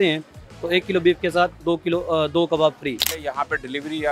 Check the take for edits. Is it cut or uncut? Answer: uncut